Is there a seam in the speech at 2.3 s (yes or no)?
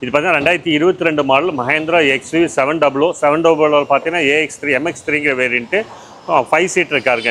no